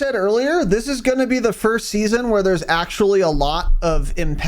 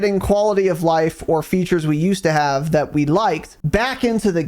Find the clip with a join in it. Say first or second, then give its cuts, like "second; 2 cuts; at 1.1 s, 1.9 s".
second; 1 cut; at 3.5 s